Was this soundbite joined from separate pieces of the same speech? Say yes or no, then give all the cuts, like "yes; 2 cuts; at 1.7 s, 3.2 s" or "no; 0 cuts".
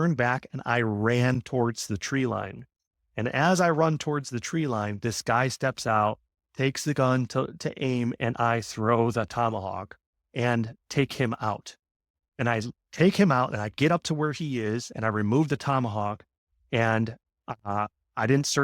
no; 0 cuts